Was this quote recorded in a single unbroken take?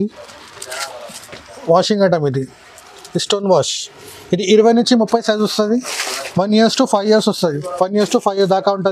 yes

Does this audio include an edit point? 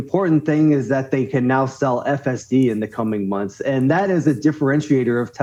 no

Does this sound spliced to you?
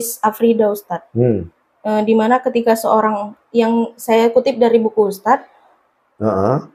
no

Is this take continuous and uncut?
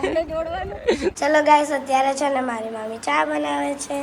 no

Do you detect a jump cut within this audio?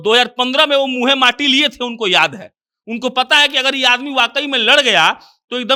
no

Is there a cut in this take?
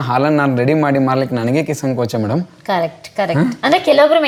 no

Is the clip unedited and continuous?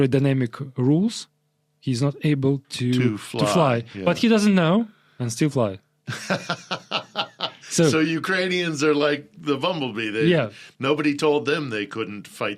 yes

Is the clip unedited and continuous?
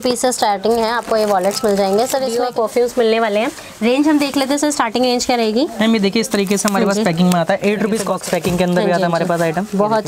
no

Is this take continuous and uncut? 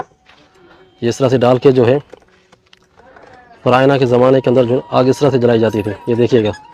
yes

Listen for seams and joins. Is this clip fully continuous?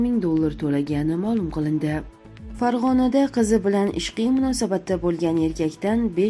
no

